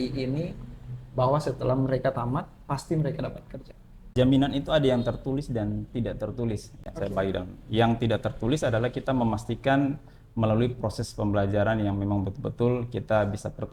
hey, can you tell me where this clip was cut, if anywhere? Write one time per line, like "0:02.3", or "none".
0:04.1